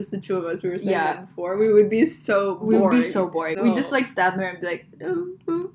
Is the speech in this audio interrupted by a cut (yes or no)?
yes